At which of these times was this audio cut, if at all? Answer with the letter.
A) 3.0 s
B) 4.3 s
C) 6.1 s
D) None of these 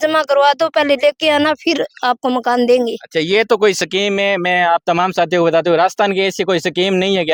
D